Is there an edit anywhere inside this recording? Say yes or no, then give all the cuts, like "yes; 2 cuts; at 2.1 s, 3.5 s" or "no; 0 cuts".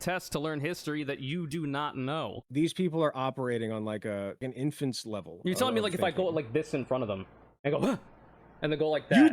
yes; 2 cuts; at 2.4 s, 4.4 s